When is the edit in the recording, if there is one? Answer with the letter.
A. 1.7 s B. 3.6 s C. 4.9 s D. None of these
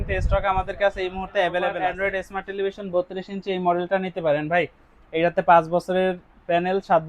A